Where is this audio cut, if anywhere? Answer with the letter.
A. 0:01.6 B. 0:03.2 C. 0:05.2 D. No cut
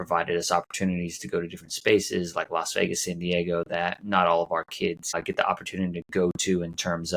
C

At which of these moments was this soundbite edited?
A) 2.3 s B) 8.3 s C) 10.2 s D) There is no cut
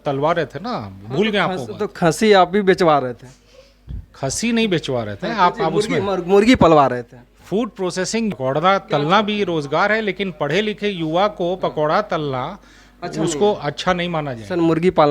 B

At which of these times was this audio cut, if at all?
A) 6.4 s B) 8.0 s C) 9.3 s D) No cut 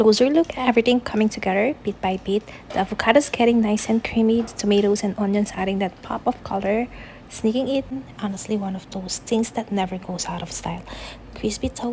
B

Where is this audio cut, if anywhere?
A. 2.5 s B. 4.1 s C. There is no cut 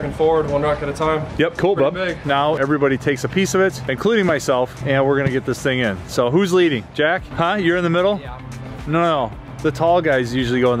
A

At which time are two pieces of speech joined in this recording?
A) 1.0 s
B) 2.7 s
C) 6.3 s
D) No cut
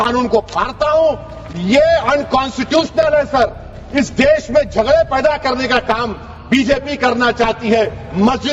D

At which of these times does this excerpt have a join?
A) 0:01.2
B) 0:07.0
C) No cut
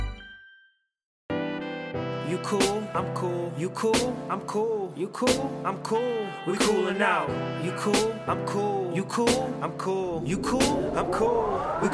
A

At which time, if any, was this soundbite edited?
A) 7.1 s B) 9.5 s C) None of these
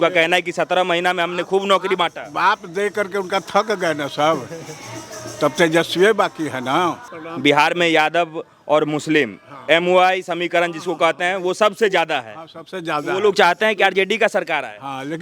A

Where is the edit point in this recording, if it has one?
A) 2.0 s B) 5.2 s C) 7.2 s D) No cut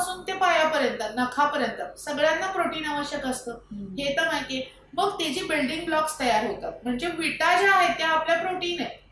D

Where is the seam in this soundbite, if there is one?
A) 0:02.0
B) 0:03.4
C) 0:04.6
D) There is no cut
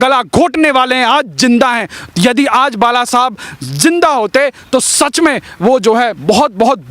D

